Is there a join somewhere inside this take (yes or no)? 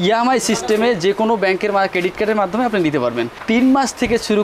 yes